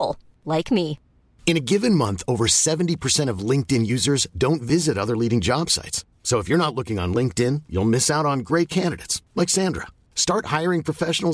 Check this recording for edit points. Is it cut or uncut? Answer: uncut